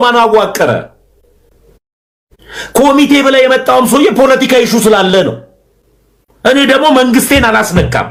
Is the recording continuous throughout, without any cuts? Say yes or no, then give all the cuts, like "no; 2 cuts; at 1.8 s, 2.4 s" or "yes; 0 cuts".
yes; 0 cuts